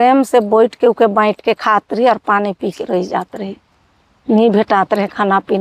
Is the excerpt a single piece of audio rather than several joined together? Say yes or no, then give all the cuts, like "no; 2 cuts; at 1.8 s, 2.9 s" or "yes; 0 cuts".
yes; 0 cuts